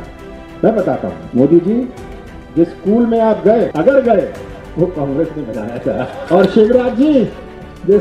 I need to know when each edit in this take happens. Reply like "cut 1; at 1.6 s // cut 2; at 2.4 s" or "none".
cut 1; at 1.2 s // cut 2; at 3.7 s // cut 3; at 6.2 s